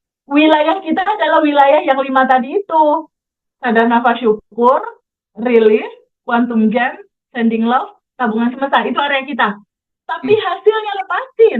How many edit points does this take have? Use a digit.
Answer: 0